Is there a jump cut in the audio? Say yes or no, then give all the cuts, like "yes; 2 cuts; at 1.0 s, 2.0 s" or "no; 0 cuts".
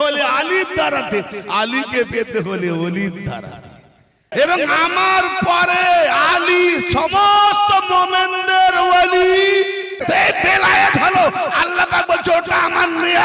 yes; 2 cuts; at 4.3 s, 10.0 s